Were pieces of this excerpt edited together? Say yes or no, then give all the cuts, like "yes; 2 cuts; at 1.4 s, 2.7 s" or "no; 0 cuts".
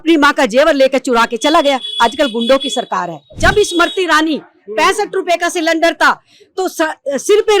yes; 1 cut; at 3.3 s